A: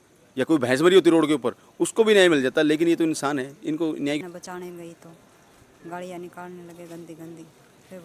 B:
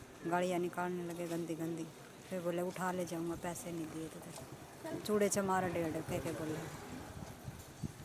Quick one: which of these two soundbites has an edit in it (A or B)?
A